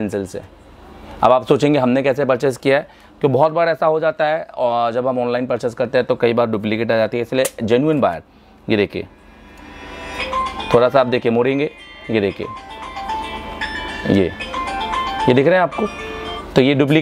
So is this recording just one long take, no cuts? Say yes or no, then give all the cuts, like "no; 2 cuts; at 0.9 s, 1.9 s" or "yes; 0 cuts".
yes; 0 cuts